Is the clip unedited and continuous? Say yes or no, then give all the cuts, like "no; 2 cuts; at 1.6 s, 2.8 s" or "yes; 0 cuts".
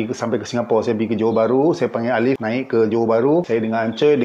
no; 2 cuts; at 2.4 s, 3.5 s